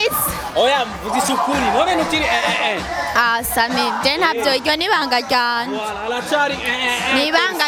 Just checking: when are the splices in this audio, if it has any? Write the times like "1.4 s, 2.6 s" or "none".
none